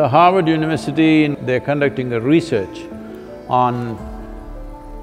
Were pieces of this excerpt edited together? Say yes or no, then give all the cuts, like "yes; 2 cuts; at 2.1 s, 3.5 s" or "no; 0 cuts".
yes; 1 cut; at 1.4 s